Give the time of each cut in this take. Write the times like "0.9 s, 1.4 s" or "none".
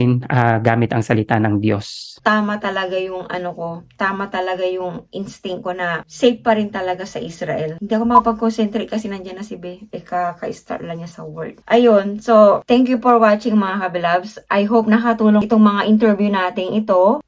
2.1 s